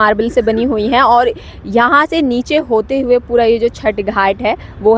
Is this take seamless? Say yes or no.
yes